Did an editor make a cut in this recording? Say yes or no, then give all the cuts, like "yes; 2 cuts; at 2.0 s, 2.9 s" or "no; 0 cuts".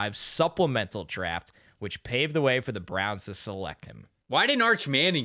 yes; 1 cut; at 4.3 s